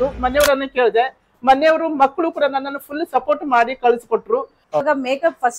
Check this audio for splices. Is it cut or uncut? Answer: cut